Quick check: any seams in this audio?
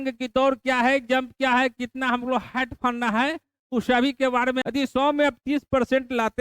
yes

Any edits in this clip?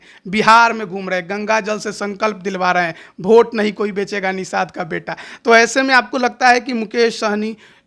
no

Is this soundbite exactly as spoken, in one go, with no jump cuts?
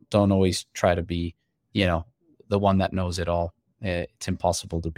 yes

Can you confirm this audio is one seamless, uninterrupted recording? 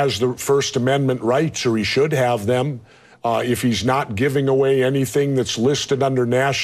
yes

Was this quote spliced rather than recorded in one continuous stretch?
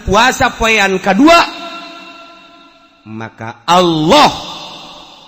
no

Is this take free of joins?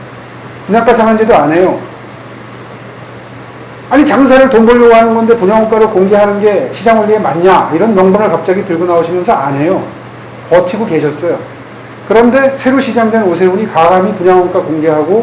yes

